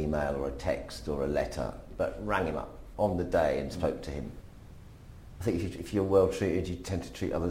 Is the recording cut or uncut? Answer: cut